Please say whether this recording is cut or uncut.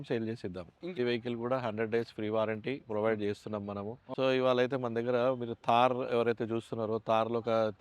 cut